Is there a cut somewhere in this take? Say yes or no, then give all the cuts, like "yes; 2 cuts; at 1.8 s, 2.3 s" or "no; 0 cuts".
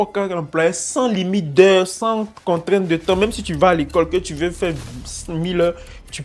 no; 0 cuts